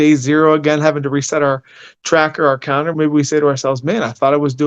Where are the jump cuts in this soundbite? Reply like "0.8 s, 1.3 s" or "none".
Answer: 2.9 s